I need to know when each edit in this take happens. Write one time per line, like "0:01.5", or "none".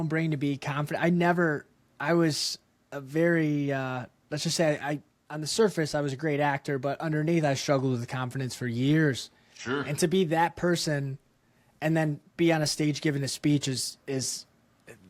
none

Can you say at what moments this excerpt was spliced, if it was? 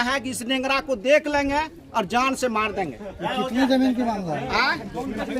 none

